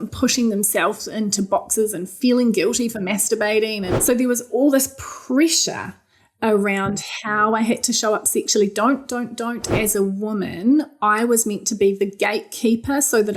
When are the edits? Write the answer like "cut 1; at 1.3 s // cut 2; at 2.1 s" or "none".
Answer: cut 1; at 3.9 s // cut 2; at 9.7 s

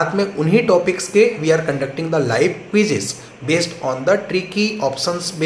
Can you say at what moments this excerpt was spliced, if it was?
none

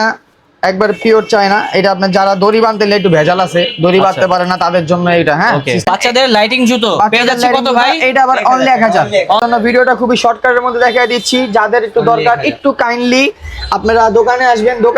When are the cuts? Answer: cut 1; at 5.9 s // cut 2; at 9.4 s

